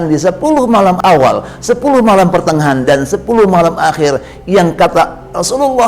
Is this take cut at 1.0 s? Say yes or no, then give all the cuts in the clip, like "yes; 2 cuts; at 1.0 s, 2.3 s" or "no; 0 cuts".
yes; 1 cut; at 1.0 s